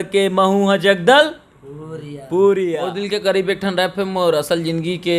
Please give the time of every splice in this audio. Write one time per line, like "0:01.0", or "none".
0:02.9